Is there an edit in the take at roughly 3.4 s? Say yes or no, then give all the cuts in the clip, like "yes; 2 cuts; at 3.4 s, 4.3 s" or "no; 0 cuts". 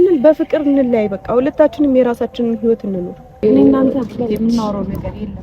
yes; 1 cut; at 3.4 s